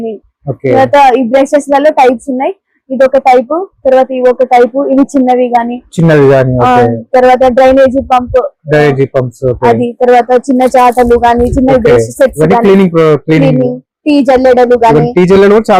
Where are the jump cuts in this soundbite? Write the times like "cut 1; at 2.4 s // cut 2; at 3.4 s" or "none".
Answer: none